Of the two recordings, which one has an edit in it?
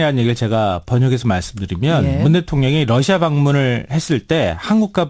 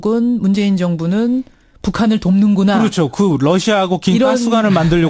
first; 1 cut; at 3.1 s

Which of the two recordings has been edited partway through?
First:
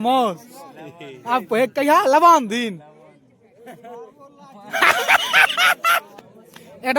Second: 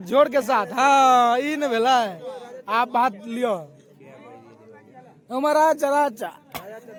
first; 1 cut; at 6.1 s

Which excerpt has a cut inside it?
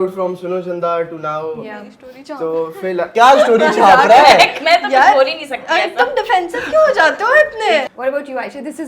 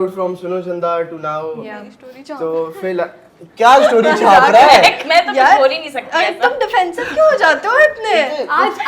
first; 2 cuts; at 3.1 s, 7.9 s

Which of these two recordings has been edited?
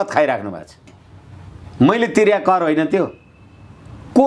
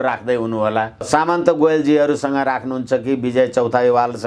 second; 1 cut; at 1.1 s

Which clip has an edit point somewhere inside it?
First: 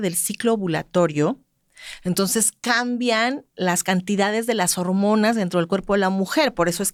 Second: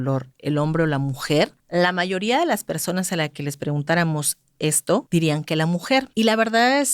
second; 3 cuts; at 1.6 s, 5.1 s, 6.1 s

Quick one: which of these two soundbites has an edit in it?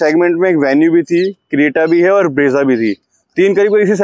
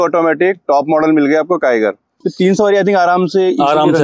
second; 1 cut; at 2.2 s

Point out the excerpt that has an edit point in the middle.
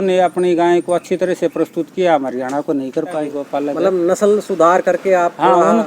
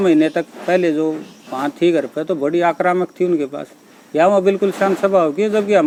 first; 1 cut; at 3.4 s

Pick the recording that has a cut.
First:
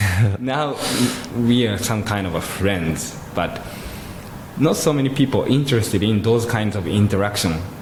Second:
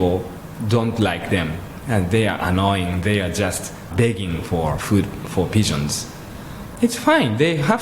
second; 2 cuts; at 3.9 s, 4.8 s

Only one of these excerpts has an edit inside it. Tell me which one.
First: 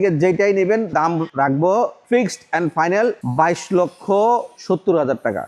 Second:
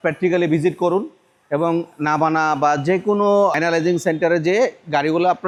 first; 4 cuts; at 0.9 s, 2.0 s, 3.2 s, 4.5 s

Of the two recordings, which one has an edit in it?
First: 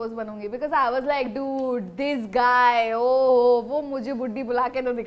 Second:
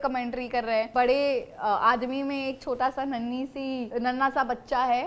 second; 2 cuts; at 0.9 s, 3.9 s

